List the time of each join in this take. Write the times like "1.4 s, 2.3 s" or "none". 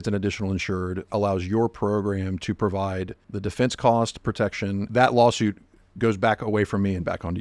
3.2 s, 4.8 s